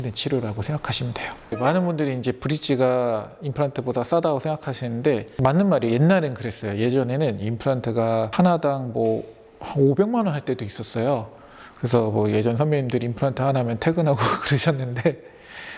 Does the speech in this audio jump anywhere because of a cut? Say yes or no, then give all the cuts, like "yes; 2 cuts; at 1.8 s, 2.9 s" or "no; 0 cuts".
no; 0 cuts